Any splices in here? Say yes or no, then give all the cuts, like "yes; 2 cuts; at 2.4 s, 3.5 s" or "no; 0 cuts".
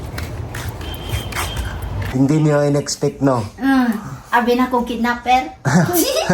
yes; 1 cut; at 2.1 s